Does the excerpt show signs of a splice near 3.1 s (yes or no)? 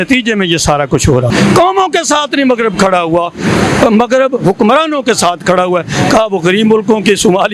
no